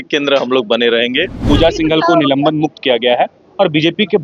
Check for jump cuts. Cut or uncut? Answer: cut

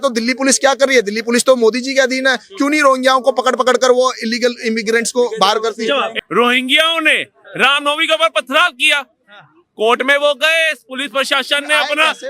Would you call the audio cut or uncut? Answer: cut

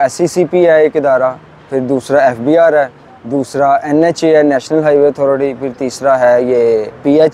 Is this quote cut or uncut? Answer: uncut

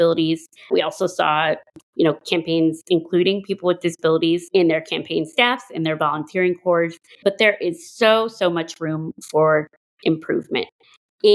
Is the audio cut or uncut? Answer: cut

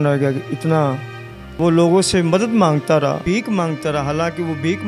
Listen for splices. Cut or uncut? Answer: cut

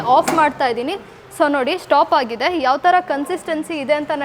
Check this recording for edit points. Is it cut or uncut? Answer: uncut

